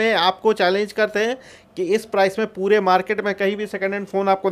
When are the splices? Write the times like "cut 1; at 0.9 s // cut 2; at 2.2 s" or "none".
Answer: none